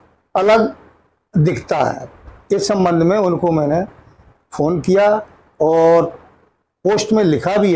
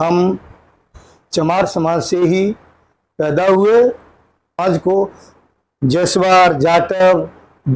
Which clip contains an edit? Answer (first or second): second